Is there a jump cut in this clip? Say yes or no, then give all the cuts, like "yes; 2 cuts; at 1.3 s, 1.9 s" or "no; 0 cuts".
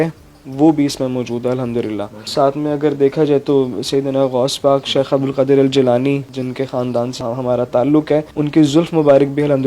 no; 0 cuts